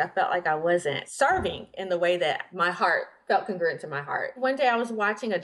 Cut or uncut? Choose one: cut